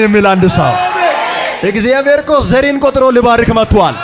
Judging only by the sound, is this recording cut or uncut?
cut